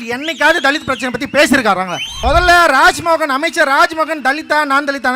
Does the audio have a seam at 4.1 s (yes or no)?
no